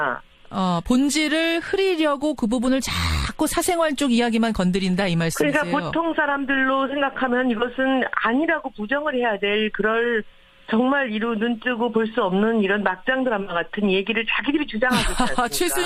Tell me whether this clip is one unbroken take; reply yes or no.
no